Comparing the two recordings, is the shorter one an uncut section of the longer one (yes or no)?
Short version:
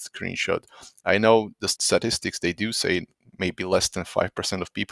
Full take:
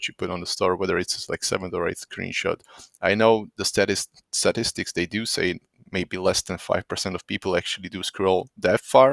no